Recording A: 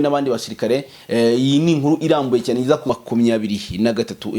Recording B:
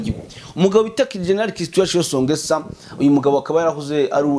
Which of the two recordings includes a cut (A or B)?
A